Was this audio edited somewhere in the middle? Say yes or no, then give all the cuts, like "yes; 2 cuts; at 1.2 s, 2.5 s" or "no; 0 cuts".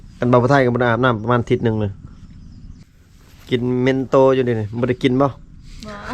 yes; 1 cut; at 2.8 s